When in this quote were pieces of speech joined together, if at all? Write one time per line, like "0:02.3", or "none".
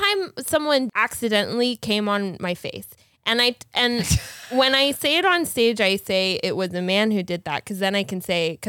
0:00.9